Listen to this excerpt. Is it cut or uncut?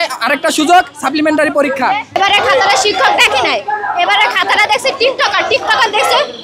cut